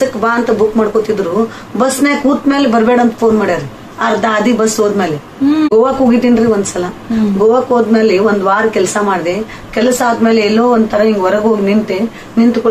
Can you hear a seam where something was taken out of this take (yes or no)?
yes